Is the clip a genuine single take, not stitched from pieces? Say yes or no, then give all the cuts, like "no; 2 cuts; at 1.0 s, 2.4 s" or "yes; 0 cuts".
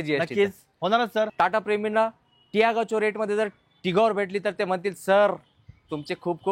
no; 1 cut; at 1.3 s